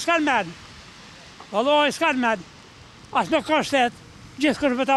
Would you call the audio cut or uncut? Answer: uncut